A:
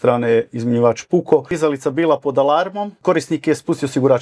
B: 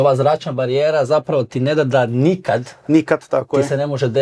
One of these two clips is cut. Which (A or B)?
A